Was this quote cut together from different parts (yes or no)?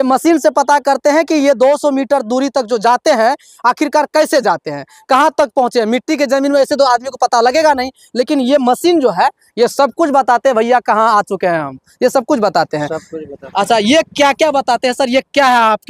no